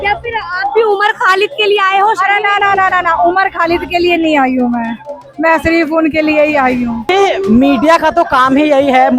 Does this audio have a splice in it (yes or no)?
yes